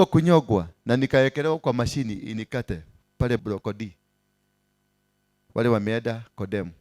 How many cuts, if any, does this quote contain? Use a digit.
1